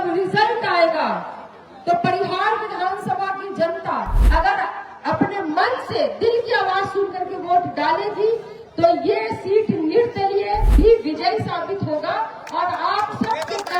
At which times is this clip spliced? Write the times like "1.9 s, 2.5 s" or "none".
4.2 s, 10.7 s